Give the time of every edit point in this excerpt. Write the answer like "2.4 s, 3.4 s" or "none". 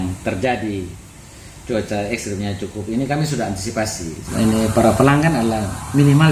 4.2 s